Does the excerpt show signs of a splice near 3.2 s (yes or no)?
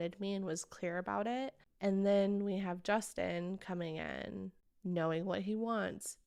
no